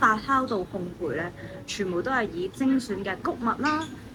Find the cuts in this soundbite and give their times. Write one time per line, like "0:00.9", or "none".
none